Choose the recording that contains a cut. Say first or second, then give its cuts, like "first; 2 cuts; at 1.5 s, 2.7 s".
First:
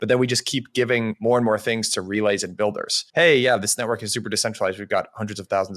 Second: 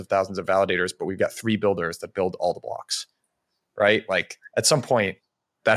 first; 2 cuts; at 1.1 s, 2.9 s